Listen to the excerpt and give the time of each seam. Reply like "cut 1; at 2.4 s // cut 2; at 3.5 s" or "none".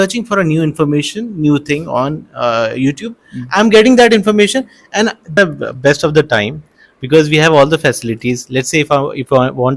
cut 1; at 5.4 s